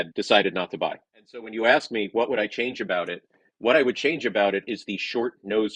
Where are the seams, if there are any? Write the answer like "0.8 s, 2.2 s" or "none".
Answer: none